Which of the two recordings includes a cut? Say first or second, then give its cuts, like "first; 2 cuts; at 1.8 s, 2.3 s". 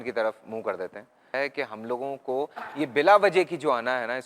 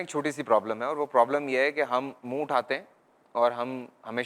first; 1 cut; at 1.3 s